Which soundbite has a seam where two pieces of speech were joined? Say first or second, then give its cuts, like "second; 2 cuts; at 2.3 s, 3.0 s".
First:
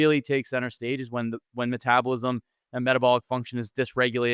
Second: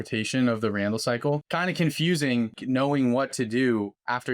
second; 2 cuts; at 1.5 s, 2.6 s